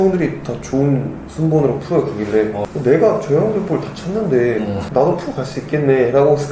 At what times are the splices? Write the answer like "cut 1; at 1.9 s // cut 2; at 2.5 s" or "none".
cut 1; at 2.6 s // cut 2; at 4.8 s

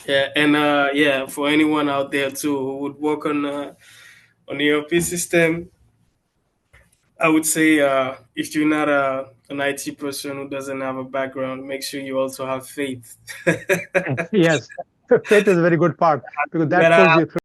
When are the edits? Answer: none

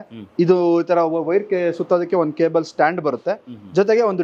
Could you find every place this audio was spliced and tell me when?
none

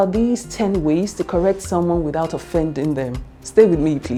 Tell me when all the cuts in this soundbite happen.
none

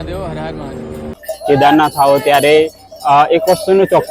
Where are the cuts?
cut 1; at 1.3 s

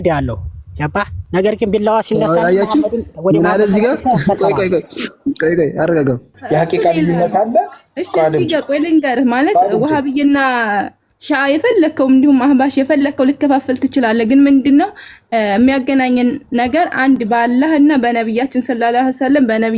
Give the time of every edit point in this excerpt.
cut 1; at 1.2 s // cut 2; at 6.3 s

